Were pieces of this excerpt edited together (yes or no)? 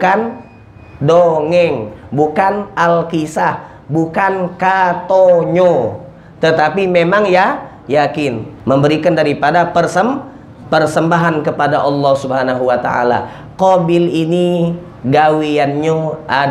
yes